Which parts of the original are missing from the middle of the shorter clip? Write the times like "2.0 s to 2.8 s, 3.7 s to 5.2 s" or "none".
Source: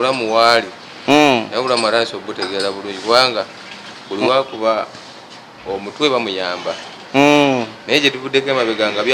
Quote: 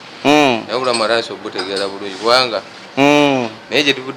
3.6 s to 6.9 s